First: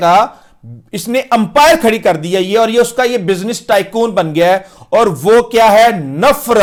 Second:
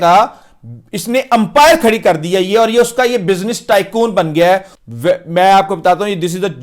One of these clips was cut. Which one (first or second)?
second